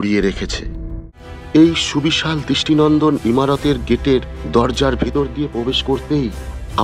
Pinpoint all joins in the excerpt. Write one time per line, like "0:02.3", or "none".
0:01.0